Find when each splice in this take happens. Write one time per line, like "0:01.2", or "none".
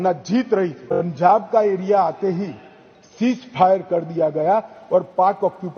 0:01.1